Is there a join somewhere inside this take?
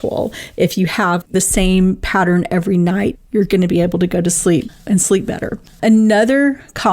yes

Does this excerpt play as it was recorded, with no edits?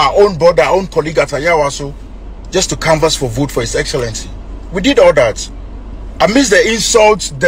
yes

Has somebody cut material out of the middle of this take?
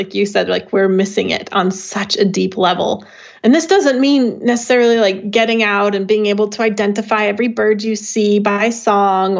no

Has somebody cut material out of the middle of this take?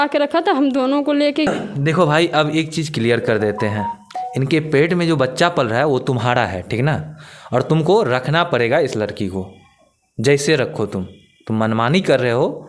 yes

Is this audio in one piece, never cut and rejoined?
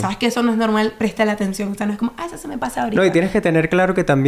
yes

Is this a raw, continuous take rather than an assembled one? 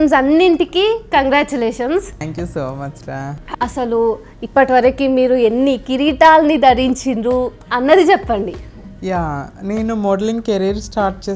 no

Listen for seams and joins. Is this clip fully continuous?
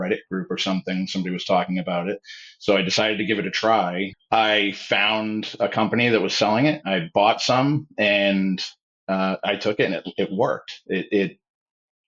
no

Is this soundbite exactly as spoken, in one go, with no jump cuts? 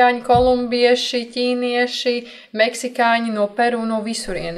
yes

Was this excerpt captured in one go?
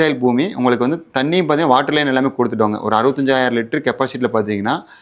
yes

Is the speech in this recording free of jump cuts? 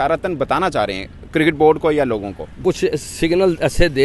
no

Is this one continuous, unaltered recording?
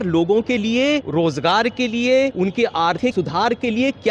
no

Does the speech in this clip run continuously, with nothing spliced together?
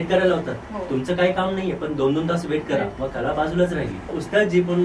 no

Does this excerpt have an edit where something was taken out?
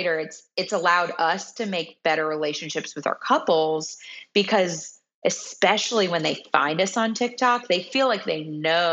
no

